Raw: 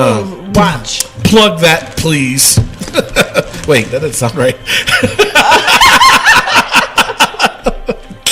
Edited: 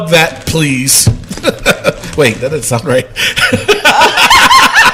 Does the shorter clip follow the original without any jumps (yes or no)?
yes